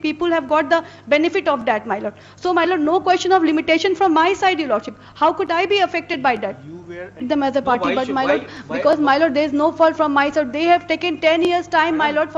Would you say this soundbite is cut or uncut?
cut